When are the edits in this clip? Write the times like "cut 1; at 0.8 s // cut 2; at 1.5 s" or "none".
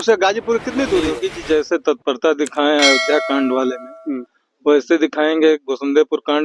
cut 1; at 1.1 s

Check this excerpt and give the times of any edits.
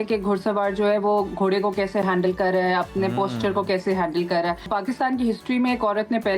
cut 1; at 4.7 s

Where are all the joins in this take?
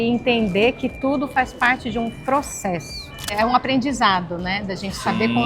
cut 1; at 3.3 s

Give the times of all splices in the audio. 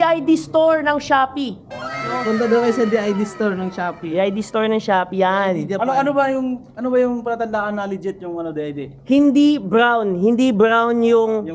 none

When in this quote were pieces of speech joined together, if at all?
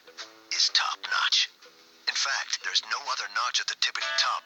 none

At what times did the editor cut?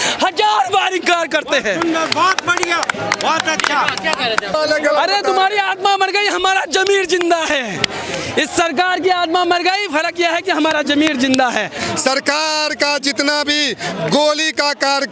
cut 1; at 4.5 s // cut 2; at 11.8 s

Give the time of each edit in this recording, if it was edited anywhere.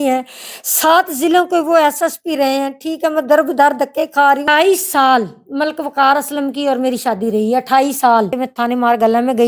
cut 1; at 4.4 s // cut 2; at 8.4 s

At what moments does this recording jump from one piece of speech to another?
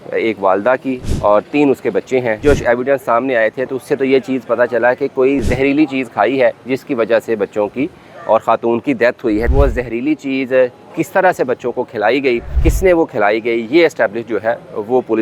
cut 1; at 1.0 s // cut 2; at 2.4 s // cut 3; at 5.4 s // cut 4; at 9.5 s // cut 5; at 12.6 s

